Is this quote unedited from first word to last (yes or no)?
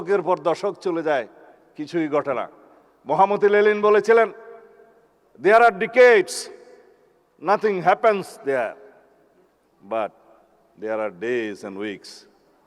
yes